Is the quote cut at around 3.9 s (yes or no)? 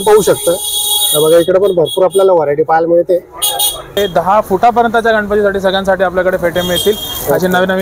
yes